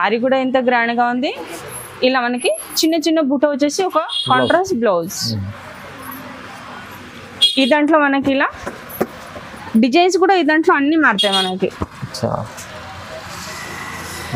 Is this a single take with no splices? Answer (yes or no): yes